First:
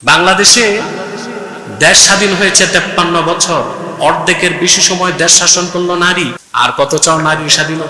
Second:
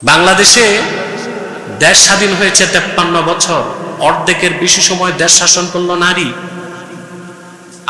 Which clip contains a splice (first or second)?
first